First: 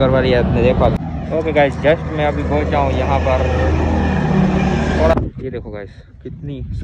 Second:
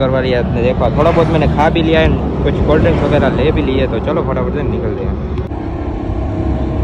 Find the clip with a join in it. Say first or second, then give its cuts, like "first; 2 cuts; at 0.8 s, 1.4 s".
first; 2 cuts; at 0.9 s, 5.1 s